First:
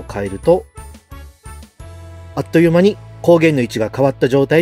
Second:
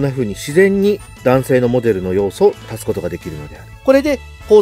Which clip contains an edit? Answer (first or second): second